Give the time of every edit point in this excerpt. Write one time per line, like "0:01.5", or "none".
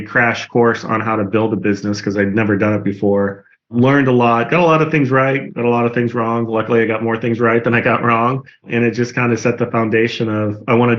none